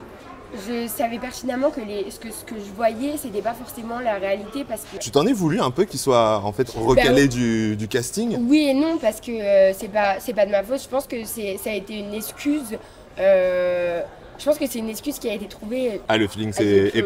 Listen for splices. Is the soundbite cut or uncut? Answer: cut